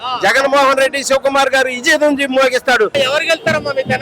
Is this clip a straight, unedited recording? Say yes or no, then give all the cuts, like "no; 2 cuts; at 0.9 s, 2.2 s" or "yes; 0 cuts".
no; 1 cut; at 2.9 s